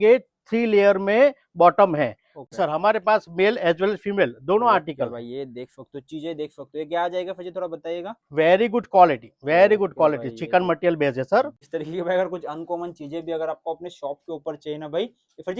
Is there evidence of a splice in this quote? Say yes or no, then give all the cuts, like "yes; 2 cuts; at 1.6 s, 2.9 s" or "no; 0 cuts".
yes; 2 cuts; at 2.5 s, 11.6 s